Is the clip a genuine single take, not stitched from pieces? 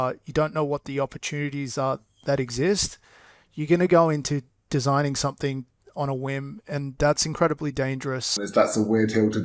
no; 1 cut; at 8.3 s

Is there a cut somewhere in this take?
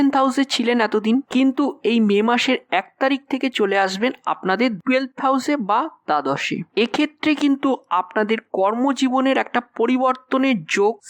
no; 0 cuts

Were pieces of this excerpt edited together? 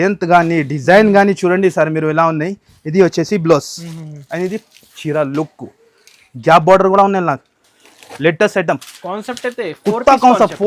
no; 0 cuts

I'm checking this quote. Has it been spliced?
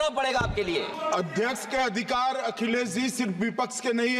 yes; 1 cut; at 0.9 s

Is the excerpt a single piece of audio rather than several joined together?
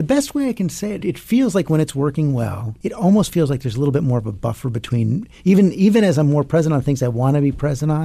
no; 2 cuts; at 1.0 s, 2.7 s

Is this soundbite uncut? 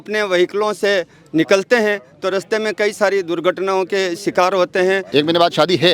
no; 1 cut; at 5.0 s

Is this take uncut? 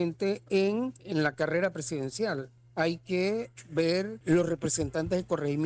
no; 3 cuts; at 1.0 s, 2.6 s, 3.8 s

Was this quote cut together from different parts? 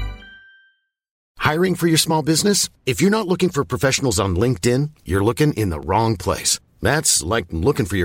yes; 1 cut; at 1.2 s

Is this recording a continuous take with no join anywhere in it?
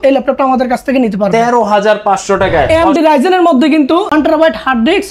no; 2 cuts; at 2.7 s, 4.1 s

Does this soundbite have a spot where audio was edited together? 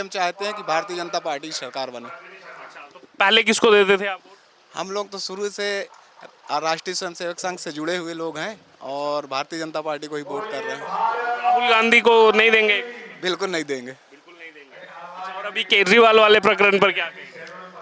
no; 0 cuts

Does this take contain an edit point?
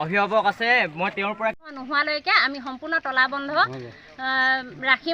yes; 1 cut; at 1.8 s

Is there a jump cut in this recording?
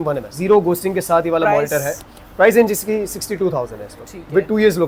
no; 0 cuts

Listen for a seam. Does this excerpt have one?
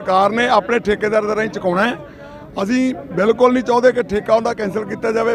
no; 0 cuts

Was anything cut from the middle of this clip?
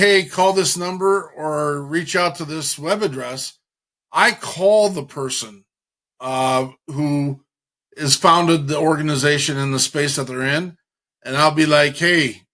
no; 0 cuts

